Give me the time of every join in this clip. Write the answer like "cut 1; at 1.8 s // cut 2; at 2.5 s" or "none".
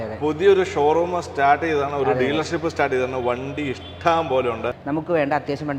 cut 1; at 4.8 s